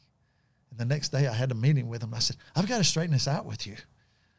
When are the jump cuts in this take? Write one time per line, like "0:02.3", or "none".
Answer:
none